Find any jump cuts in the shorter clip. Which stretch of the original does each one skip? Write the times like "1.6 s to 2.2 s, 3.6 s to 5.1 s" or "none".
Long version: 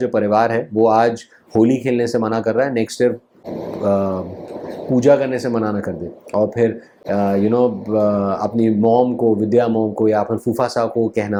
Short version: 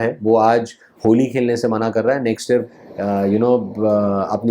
3.3 s to 6.9 s